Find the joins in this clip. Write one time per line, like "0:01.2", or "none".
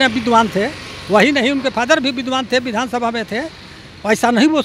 none